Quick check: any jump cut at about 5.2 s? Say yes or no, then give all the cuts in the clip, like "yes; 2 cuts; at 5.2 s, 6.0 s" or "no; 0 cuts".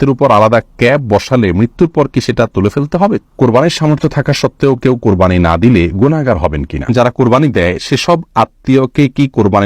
no; 2 cuts; at 3.2 s, 6.8 s